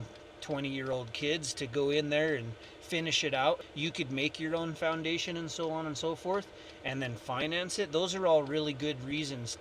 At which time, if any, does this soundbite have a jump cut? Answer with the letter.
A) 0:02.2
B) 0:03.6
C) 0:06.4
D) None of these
B